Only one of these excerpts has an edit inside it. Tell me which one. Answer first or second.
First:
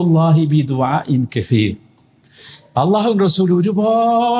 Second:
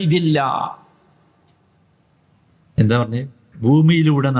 second